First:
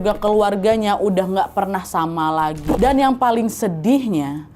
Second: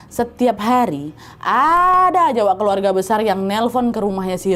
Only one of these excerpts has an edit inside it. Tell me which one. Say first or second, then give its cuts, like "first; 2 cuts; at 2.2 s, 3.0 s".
first; 1 cut; at 2.8 s